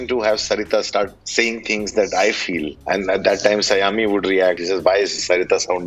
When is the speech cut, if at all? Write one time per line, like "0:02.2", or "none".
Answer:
0:01.2
0:02.7
0:04.6